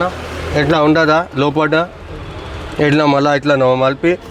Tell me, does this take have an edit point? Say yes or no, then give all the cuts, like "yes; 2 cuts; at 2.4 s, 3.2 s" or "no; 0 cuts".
no; 0 cuts